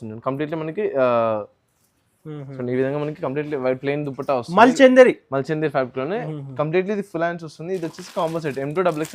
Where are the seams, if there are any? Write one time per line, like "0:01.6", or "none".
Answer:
0:06.3